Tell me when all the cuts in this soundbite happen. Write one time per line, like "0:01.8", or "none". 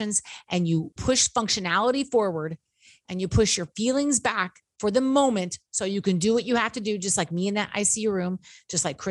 0:00.9